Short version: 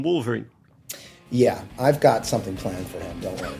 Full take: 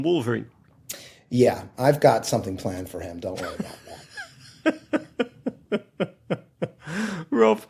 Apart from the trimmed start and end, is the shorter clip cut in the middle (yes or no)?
no